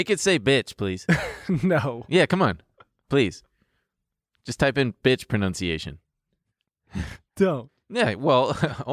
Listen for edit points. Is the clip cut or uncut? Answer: uncut